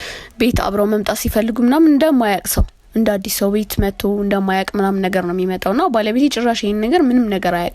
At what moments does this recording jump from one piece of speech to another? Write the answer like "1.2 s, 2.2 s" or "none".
none